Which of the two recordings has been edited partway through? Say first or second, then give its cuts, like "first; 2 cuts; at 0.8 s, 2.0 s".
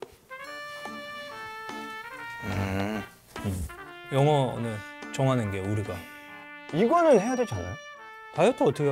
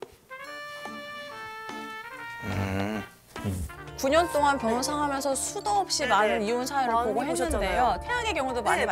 second; 1 cut; at 3.8 s